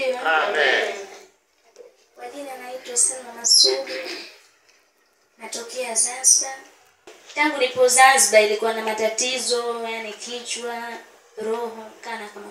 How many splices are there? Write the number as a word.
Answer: one